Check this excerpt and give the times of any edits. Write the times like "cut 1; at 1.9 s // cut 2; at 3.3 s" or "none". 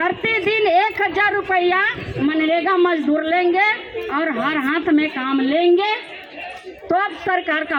none